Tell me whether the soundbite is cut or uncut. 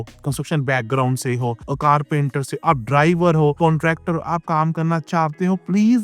uncut